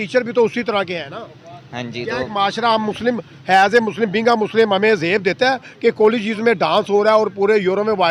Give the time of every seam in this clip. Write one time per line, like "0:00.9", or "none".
none